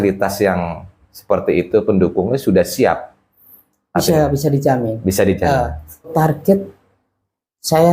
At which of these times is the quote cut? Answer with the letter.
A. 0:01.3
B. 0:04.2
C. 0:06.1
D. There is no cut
C